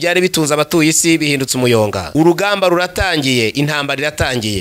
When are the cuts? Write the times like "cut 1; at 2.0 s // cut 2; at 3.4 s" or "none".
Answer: cut 1; at 2.0 s